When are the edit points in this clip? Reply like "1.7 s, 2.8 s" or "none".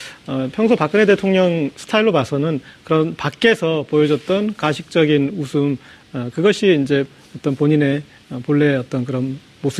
none